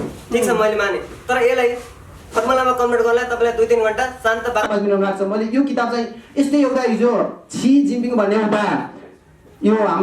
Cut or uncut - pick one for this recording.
cut